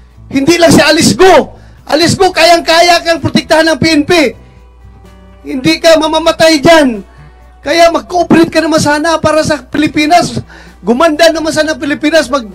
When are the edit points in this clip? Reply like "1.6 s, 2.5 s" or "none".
none

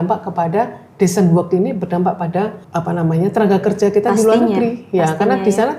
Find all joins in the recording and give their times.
2.6 s

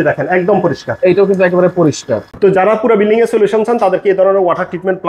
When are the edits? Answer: 2.3 s

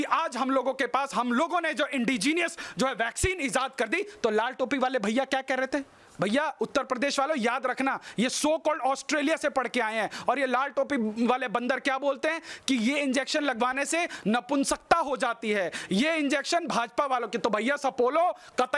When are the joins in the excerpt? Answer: none

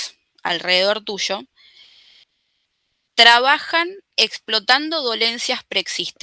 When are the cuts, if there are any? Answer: none

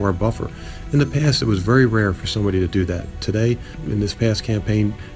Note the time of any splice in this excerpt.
3.7 s

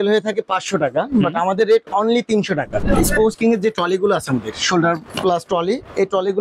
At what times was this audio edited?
2.8 s, 5.1 s

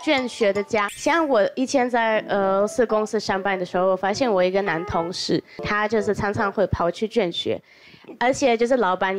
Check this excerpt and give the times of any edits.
0.9 s, 5.6 s

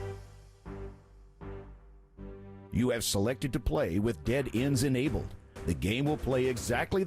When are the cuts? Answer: 2.6 s

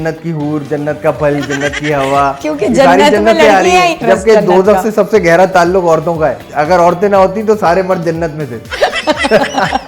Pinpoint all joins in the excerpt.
4.0 s, 6.4 s

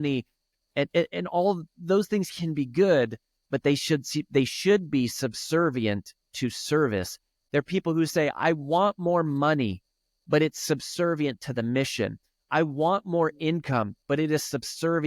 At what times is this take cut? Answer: 7.3 s

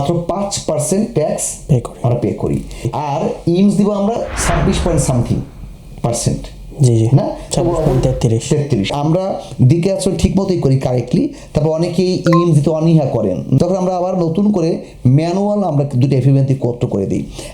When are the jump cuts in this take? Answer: 2.9 s, 8.9 s, 13.6 s

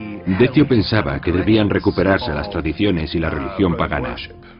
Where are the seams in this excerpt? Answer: 3.1 s

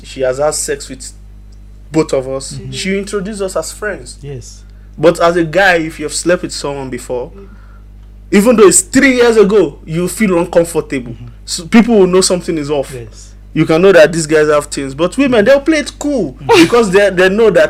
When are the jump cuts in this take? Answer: none

